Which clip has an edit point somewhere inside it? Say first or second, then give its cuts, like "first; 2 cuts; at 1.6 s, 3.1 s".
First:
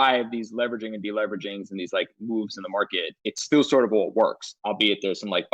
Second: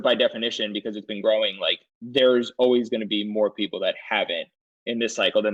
first; 2 cuts; at 3.1 s, 4.5 s